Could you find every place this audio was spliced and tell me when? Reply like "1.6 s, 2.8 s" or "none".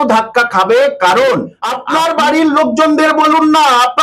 1.8 s